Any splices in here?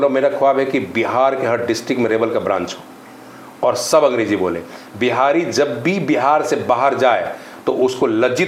no; 0 cuts

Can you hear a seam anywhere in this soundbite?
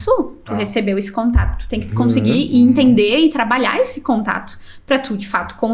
no; 0 cuts

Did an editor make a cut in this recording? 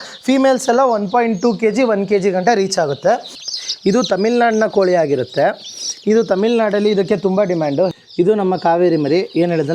yes; 2 cuts; at 3.4 s, 7.9 s

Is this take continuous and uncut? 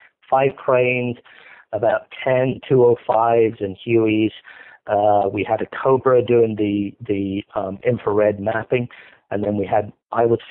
yes; 0 cuts

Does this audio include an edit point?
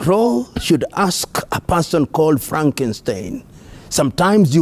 no; 0 cuts

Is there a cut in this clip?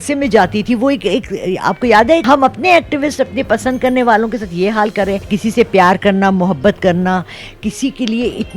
yes; 2 cuts; at 2.2 s, 5.3 s

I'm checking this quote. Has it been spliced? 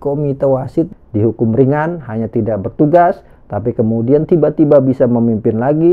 yes; 1 cut; at 0.9 s

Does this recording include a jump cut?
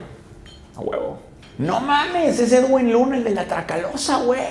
yes; 1 cut; at 1.4 s

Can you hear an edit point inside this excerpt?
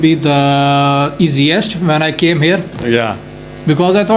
no; 0 cuts

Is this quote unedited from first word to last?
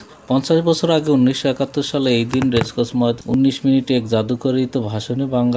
no; 1 cut; at 3.2 s

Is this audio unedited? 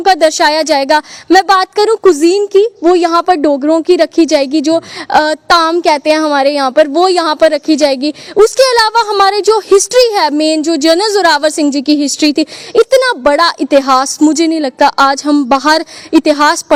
yes; 0 cuts

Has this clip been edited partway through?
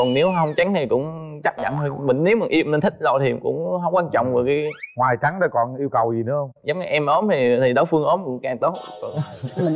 no; 0 cuts

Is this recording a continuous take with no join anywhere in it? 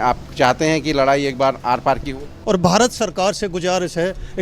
no; 1 cut; at 2.3 s

